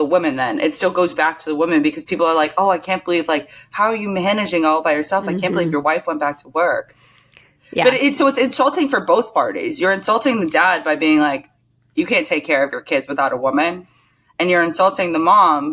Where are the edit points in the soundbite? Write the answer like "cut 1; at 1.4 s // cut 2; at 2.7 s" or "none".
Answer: none